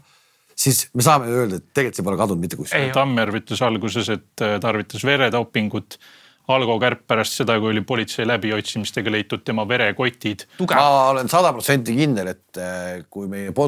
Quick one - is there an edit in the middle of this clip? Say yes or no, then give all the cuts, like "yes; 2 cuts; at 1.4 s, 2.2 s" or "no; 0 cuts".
yes; 2 cuts; at 2.9 s, 10.6 s